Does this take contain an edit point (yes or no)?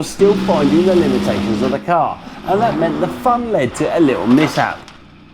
no